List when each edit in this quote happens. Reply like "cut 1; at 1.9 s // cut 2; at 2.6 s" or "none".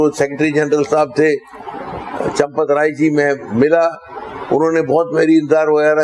none